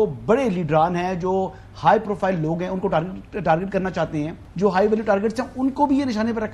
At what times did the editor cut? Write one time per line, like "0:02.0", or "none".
0:04.4

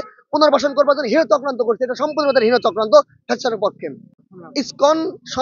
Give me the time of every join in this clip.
none

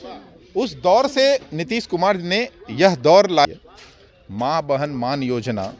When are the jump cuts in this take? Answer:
0:03.5

